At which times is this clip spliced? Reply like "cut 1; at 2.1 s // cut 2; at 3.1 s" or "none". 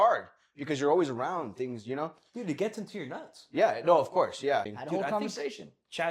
cut 1; at 4.8 s

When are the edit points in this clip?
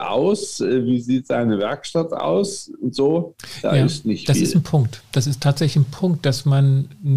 cut 1; at 3.4 s

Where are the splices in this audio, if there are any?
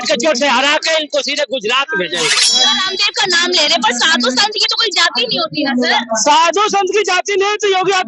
cut 1; at 2.7 s

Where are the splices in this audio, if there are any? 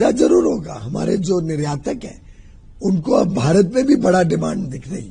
none

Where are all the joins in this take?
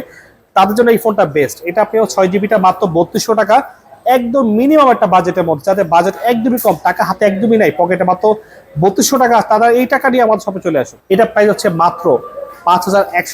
cut 1; at 10.9 s

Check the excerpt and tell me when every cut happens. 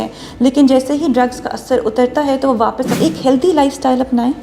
cut 1; at 3.0 s

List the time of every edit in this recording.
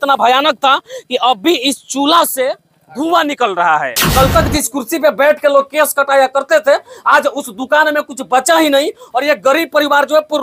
cut 1; at 4.0 s

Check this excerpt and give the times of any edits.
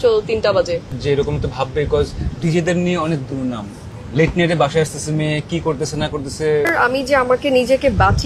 cut 1; at 1.0 s // cut 2; at 3.9 s // cut 3; at 6.7 s

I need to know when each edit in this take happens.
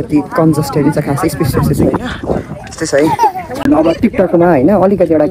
cut 1; at 3.6 s

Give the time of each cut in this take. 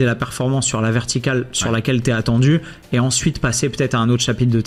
none

